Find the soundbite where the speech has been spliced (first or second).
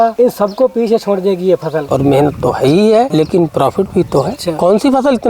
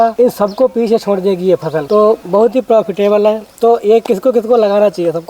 first